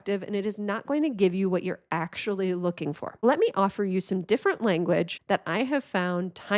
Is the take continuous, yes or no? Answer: no